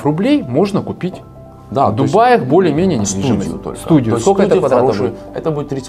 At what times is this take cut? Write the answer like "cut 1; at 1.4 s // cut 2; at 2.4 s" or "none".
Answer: none